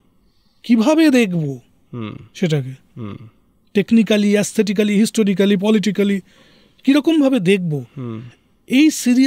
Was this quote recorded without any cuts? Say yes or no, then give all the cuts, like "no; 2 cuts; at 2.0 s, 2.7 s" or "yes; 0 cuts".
yes; 0 cuts